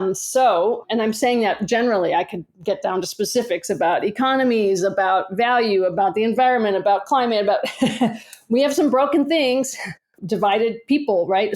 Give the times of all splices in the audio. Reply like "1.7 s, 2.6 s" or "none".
0.8 s, 10.2 s